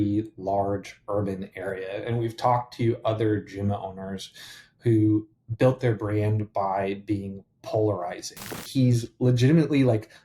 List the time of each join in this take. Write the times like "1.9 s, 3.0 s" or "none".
8.6 s